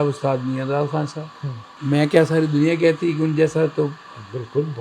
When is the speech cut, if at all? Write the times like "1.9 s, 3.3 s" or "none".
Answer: 1.7 s